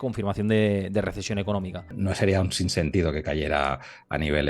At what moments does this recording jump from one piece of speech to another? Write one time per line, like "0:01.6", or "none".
0:01.9